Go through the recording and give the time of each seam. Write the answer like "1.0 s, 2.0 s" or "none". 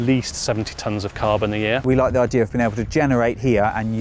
1.8 s